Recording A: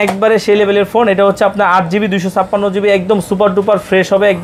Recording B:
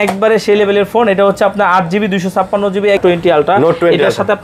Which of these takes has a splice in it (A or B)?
B